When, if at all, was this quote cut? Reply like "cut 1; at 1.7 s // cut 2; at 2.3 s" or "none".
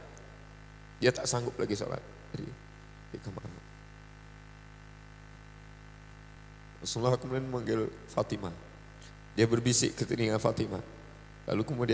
cut 1; at 6.4 s